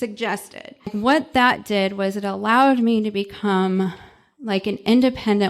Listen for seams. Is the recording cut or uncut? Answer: cut